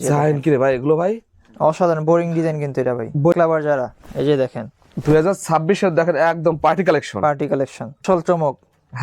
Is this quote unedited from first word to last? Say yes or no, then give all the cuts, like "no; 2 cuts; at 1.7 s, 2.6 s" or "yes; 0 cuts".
no; 2 cuts; at 3.3 s, 8.0 s